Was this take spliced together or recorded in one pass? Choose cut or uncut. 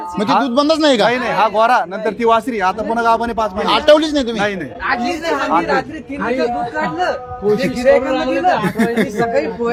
uncut